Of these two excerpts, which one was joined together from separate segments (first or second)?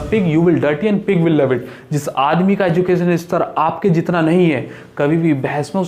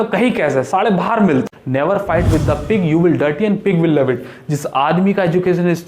second